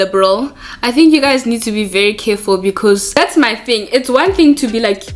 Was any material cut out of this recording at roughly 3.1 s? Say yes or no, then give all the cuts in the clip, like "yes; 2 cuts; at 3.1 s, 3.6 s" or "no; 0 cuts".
yes; 1 cut; at 3.1 s